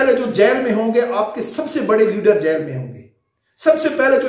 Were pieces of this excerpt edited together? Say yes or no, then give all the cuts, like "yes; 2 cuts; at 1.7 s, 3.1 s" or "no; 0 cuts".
no; 0 cuts